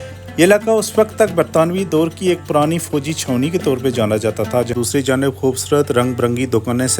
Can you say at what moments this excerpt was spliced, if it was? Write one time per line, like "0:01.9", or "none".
0:04.7